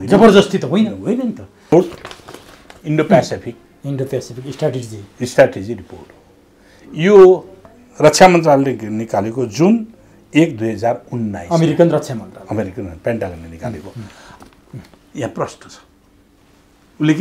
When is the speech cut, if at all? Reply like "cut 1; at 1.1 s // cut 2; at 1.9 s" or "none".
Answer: cut 1; at 1.7 s // cut 2; at 14.3 s